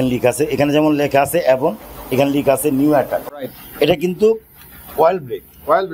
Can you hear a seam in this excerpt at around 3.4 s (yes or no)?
no